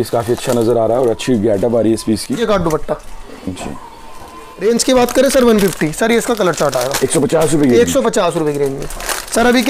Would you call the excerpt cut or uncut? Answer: cut